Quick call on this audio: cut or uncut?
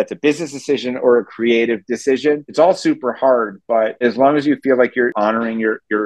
cut